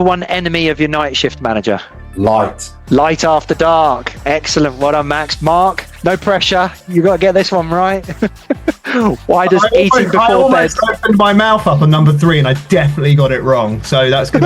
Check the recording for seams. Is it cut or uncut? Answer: uncut